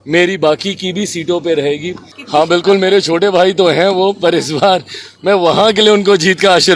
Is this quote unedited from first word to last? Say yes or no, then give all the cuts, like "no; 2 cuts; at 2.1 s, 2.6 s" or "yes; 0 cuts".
no; 1 cut; at 2.1 s